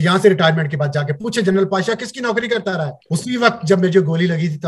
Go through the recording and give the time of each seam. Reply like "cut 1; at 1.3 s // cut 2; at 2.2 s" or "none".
cut 1; at 3.0 s

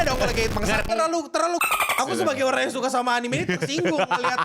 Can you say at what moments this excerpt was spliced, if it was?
cut 1; at 0.9 s // cut 2; at 2.0 s

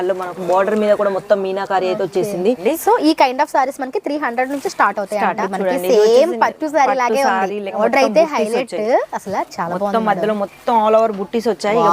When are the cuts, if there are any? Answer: cut 1; at 2.6 s // cut 2; at 5.4 s // cut 3; at 7.8 s

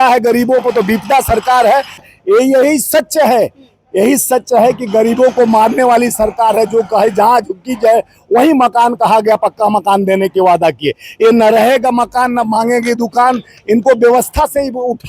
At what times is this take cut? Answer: cut 1; at 2.0 s

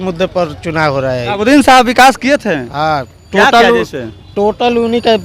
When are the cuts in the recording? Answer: cut 1; at 1.4 s

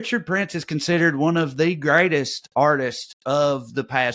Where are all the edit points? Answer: none

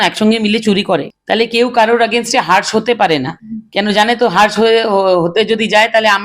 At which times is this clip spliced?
none

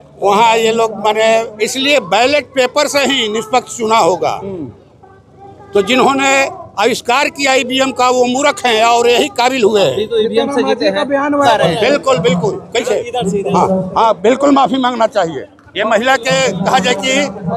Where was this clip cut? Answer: cut 1; at 1.6 s // cut 2; at 11.4 s

